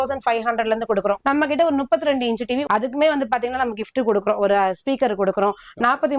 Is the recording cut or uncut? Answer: cut